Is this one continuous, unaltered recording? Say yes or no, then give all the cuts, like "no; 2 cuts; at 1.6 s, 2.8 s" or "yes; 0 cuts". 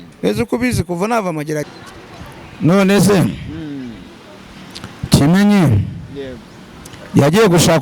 no; 1 cut; at 1.7 s